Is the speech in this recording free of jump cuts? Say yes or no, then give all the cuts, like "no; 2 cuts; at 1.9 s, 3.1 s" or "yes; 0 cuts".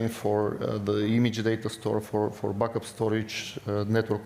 yes; 0 cuts